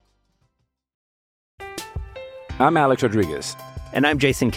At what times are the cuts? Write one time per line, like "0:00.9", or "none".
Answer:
0:01.0